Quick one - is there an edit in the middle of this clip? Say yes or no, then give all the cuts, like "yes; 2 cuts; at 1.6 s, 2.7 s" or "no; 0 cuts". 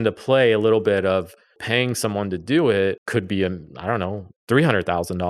yes; 2 cuts; at 1.6 s, 3.0 s